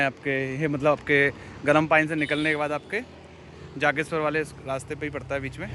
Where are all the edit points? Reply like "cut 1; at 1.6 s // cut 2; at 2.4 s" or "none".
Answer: none